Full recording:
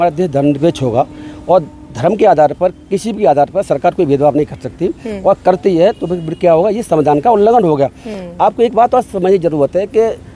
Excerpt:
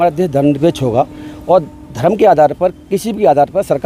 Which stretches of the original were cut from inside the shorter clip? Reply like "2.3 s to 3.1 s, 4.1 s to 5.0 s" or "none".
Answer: none